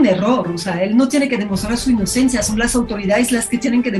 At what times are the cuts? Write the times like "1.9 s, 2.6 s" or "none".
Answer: none